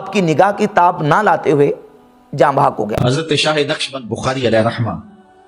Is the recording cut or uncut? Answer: cut